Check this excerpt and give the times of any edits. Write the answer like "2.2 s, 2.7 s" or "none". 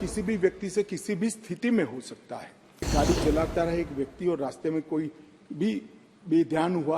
2.9 s